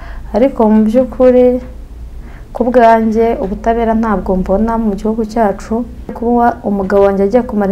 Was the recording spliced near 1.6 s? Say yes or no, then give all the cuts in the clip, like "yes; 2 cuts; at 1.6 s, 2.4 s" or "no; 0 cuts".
no; 1 cut; at 6.2 s